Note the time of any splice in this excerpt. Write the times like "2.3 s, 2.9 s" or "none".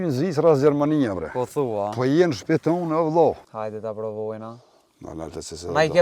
3.5 s